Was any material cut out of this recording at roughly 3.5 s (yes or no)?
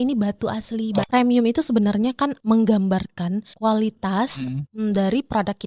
yes